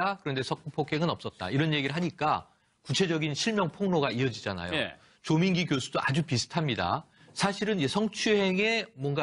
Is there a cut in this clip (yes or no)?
no